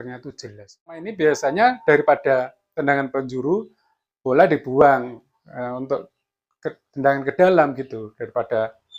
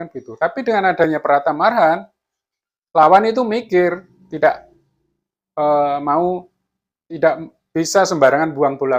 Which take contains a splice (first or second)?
first